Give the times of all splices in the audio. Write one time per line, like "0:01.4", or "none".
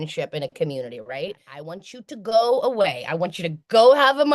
0:01.7